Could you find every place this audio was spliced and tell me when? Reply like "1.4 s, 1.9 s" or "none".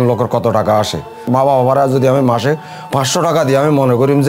1.2 s

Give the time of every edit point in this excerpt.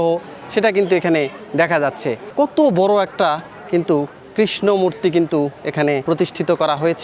2.2 s, 6.0 s

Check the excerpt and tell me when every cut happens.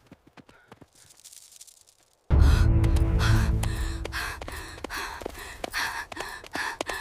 2.2 s

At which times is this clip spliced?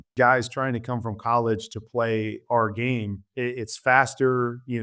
3.2 s

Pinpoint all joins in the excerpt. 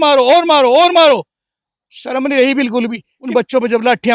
3.1 s

